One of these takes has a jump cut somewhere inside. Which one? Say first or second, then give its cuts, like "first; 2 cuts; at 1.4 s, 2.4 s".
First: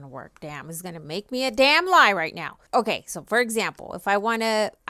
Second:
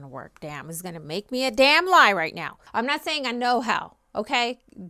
second; 1 cut; at 2.5 s